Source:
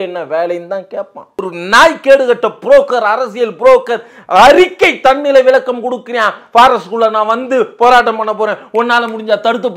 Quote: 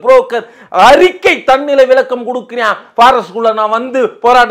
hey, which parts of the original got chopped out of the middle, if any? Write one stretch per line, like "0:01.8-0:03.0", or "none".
none